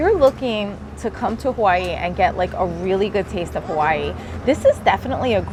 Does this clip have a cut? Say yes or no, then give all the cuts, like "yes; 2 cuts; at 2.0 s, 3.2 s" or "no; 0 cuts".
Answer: no; 0 cuts